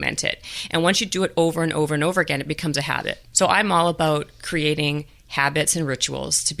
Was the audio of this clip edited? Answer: yes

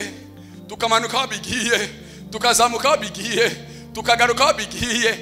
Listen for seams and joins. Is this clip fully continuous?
yes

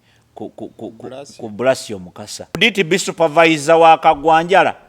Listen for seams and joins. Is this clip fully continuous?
no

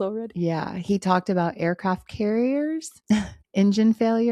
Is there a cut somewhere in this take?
yes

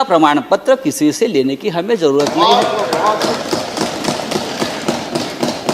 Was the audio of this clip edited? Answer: no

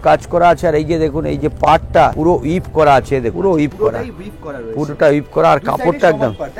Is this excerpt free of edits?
no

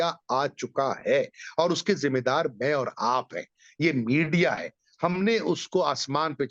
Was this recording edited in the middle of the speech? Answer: no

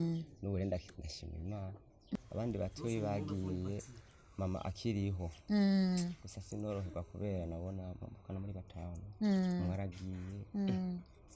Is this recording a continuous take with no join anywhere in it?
no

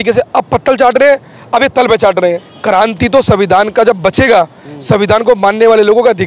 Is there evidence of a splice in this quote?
yes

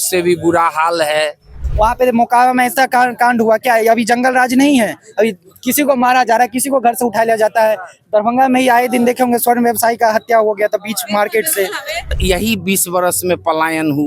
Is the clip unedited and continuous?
no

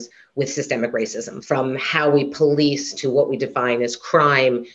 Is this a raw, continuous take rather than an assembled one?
no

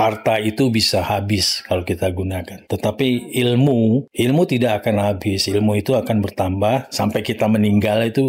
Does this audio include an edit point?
yes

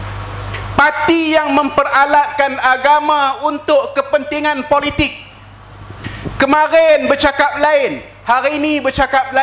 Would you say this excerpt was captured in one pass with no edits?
yes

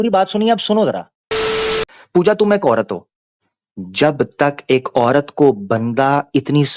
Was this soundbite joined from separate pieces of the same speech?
yes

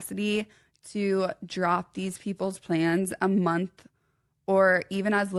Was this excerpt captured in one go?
yes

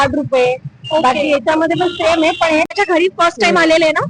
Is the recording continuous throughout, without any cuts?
no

